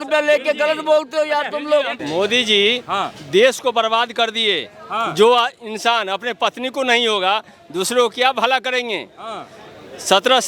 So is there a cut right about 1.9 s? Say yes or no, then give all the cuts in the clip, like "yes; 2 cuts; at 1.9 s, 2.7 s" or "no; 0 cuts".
yes; 1 cut; at 1.9 s